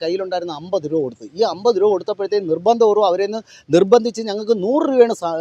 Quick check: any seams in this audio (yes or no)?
no